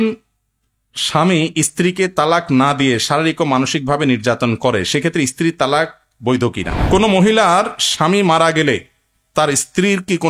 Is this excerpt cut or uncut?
cut